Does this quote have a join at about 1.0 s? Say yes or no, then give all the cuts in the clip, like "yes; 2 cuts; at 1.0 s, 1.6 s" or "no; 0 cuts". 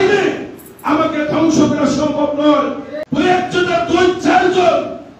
no; 1 cut; at 3.0 s